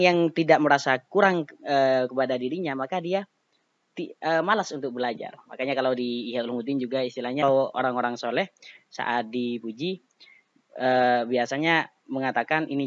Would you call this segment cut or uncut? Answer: cut